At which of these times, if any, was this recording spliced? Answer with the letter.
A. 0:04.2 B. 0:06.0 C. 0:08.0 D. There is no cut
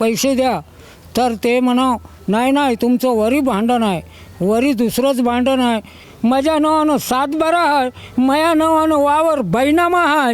B